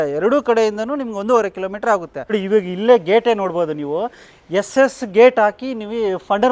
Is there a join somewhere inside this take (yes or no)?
yes